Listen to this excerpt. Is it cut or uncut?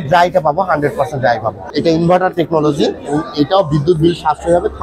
cut